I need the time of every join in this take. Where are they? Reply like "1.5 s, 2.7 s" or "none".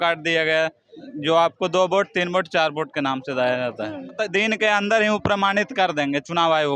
4.2 s